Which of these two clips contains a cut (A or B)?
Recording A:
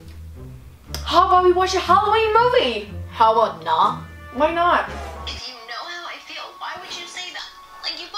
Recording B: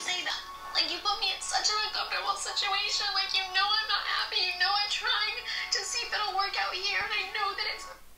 A